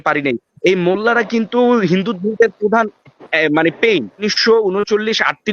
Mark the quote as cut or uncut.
cut